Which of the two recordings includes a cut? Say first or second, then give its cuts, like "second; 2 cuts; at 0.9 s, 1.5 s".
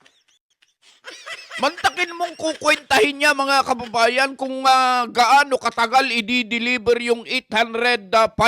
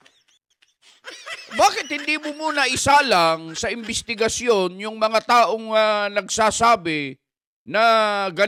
first; 1 cut; at 1.4 s